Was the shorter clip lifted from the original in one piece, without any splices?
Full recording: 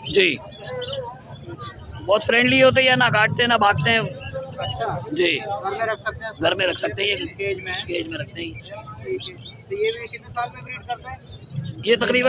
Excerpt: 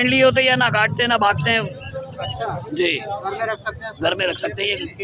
yes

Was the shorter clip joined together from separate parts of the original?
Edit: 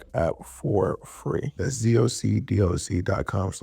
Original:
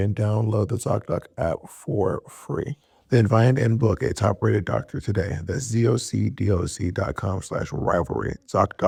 yes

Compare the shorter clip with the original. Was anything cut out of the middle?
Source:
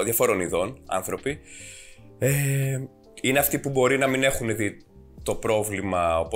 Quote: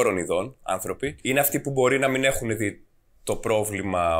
yes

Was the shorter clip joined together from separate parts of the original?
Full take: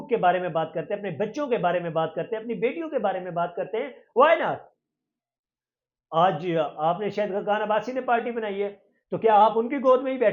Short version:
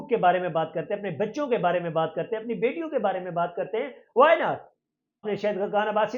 yes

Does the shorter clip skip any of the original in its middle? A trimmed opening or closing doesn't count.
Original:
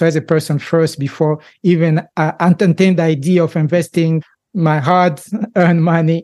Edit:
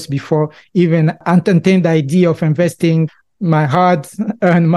yes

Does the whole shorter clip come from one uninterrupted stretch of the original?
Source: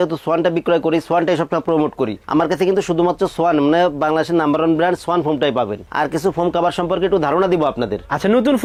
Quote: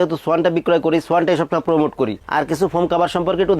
no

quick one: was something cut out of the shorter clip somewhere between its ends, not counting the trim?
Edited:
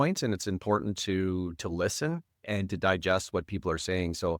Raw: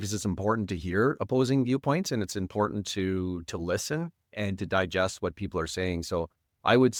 no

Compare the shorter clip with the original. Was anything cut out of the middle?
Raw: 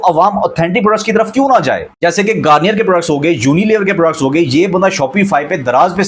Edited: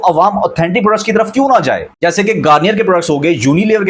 no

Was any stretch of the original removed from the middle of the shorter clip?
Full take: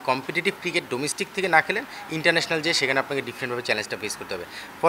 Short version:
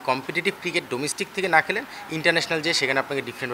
no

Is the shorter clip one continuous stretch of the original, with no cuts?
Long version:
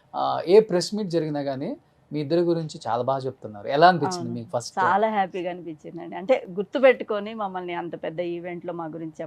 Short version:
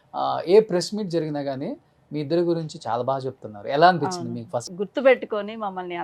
no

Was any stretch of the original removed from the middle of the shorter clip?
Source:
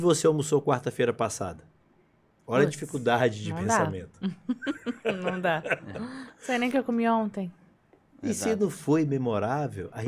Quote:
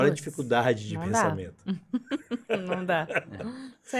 no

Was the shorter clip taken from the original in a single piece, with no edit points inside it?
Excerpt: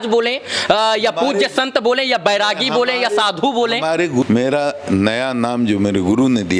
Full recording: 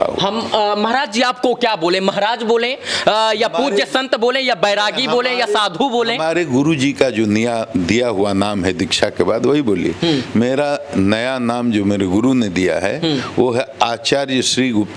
no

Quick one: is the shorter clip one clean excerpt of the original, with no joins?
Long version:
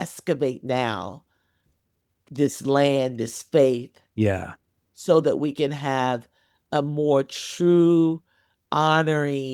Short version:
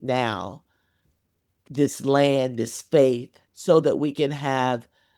no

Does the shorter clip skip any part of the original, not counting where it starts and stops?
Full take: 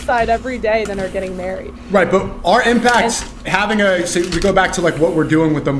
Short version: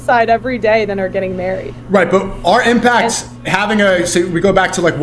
no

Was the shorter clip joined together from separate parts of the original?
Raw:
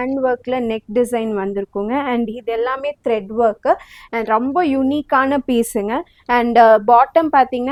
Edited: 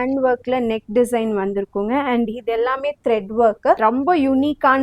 yes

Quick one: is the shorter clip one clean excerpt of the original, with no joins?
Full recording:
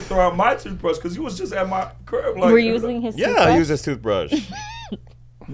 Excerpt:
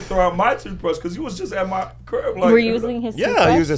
yes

